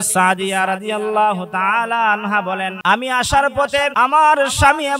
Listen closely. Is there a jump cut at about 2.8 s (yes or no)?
yes